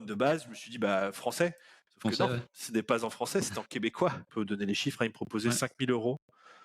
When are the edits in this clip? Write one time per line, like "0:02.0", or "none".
0:04.2